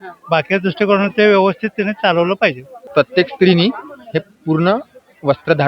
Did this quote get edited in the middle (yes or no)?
yes